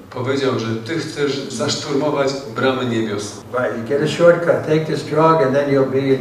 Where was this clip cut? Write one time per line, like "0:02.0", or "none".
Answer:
0:01.5
0:03.4